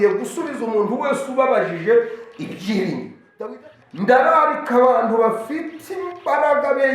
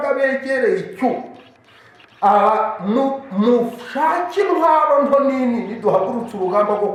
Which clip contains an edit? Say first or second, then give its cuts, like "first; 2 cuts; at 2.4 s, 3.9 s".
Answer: first; 1 cut; at 3.4 s